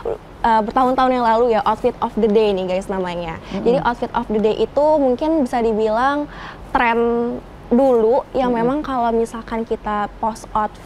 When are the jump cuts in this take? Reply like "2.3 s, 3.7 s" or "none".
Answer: none